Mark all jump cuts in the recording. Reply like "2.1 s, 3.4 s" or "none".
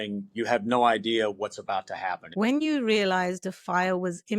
2.6 s